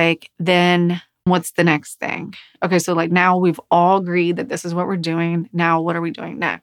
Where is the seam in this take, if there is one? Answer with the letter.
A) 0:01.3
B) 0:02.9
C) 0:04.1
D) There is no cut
A